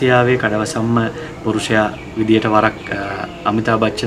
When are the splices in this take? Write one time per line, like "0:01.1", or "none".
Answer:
none